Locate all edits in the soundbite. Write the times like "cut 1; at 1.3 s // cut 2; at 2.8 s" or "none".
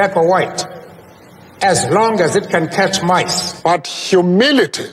cut 1; at 3.4 s